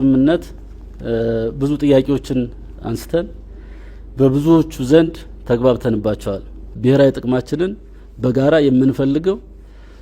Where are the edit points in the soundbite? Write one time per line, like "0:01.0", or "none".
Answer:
0:06.7